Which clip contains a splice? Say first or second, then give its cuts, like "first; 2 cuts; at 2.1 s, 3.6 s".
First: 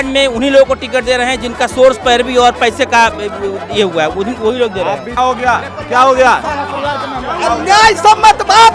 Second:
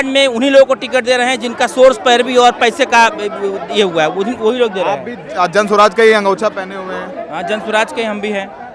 first; 1 cut; at 5.1 s